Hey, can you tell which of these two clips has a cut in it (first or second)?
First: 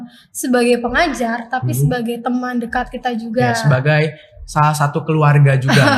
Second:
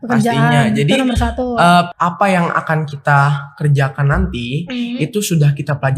second